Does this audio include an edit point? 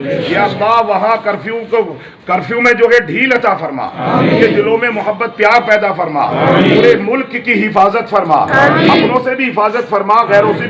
no; 0 cuts

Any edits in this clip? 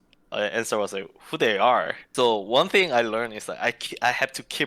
yes; 1 cut; at 2.0 s

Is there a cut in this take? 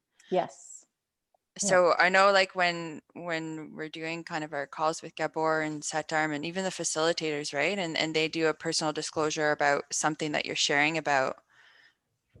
no; 0 cuts

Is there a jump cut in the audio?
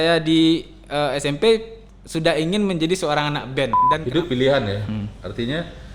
yes; 1 cut; at 3.9 s

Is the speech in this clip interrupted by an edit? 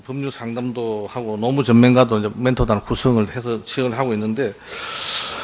no; 0 cuts

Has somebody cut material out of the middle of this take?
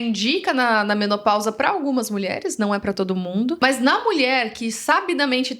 yes; 1 cut; at 3.6 s

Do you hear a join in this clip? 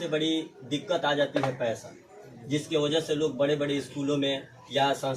no; 0 cuts

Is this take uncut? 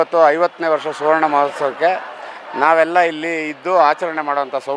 yes; 0 cuts

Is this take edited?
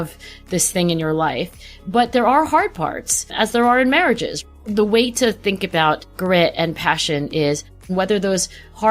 yes; 3 cuts; at 4.4 s, 6.1 s, 7.9 s

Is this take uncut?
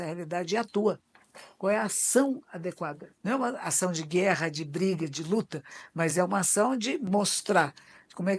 no; 1 cut; at 3.1 s

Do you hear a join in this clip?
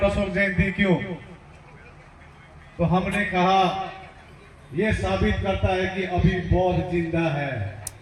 no; 0 cuts

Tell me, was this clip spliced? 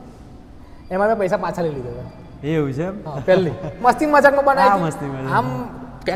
no; 0 cuts

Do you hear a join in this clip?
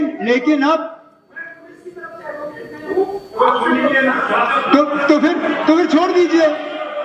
no; 0 cuts

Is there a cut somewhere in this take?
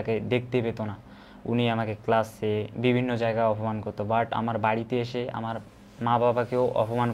no; 0 cuts

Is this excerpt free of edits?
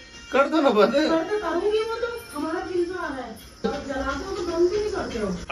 yes; 0 cuts

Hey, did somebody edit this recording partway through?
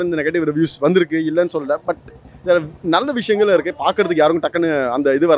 no; 0 cuts

